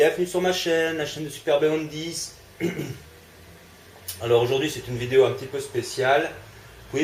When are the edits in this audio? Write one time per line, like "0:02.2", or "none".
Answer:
none